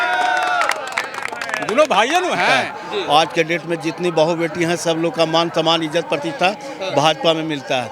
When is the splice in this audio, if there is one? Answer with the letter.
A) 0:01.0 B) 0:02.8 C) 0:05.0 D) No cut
B